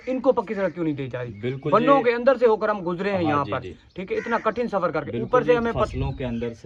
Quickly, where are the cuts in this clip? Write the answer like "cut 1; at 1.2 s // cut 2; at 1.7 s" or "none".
none

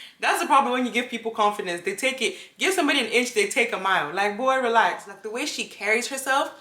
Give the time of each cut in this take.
cut 1; at 5.2 s

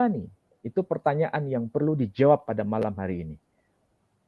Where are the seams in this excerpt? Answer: none

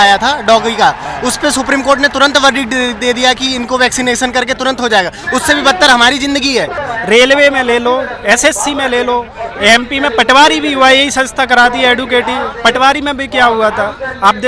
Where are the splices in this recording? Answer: cut 1; at 6.8 s

